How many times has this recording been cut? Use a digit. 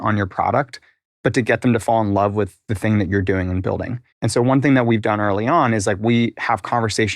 1